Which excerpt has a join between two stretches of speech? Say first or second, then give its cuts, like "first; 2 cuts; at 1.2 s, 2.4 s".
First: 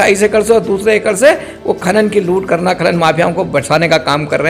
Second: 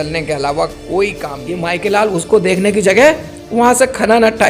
second; 1 cut; at 1.6 s